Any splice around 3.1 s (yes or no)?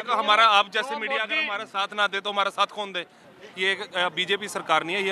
yes